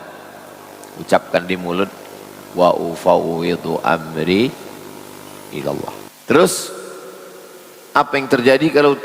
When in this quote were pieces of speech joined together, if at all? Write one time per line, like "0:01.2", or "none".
0:06.1